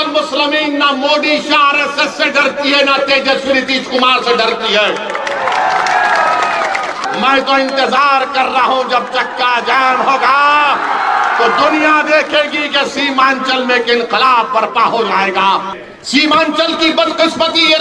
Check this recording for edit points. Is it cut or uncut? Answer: cut